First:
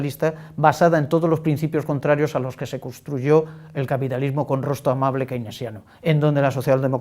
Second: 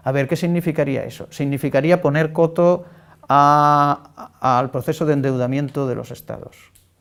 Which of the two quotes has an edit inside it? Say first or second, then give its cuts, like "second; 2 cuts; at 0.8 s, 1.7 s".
first; 1 cut; at 3.7 s